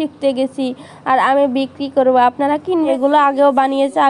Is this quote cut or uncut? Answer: cut